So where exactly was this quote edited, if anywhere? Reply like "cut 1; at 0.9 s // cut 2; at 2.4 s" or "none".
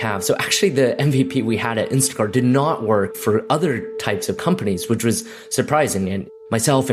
none